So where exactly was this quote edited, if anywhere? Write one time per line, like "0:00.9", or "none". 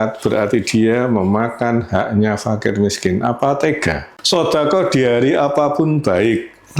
0:04.1